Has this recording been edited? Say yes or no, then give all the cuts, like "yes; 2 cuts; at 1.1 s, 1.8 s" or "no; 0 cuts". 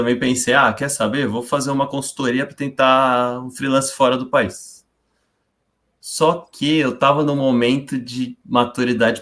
no; 0 cuts